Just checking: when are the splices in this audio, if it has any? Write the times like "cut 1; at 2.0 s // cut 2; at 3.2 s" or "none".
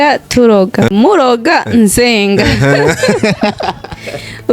cut 1; at 0.9 s